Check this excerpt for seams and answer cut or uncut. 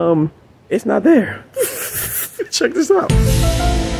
cut